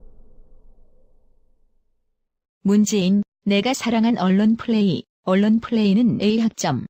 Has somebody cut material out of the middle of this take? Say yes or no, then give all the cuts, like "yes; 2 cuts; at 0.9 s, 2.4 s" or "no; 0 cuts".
no; 0 cuts